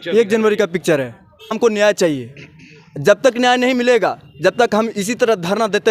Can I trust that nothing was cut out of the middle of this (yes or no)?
no